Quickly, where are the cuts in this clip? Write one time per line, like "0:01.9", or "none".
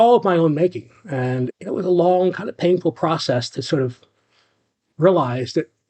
0:01.5